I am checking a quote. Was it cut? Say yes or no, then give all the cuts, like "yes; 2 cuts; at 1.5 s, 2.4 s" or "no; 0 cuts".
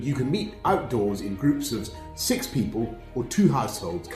no; 0 cuts